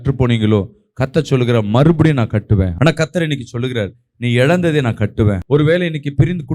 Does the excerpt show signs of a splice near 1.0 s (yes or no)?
no